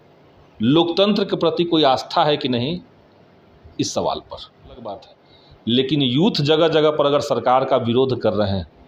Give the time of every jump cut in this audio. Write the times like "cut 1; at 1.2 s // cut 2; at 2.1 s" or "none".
cut 1; at 5.0 s